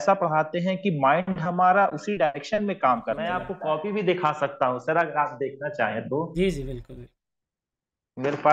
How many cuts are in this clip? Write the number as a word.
one